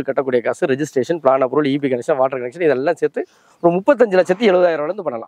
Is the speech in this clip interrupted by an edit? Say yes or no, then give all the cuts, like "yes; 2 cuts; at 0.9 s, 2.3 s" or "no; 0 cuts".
no; 0 cuts